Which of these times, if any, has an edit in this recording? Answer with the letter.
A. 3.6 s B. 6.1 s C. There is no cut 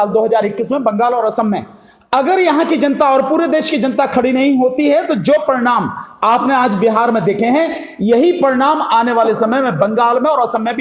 C